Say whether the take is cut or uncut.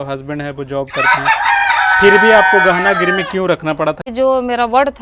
cut